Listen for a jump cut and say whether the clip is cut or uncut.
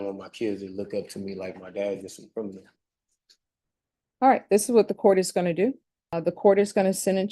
cut